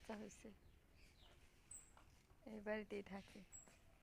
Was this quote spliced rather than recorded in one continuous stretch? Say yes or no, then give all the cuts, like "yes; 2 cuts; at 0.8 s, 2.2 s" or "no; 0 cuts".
no; 0 cuts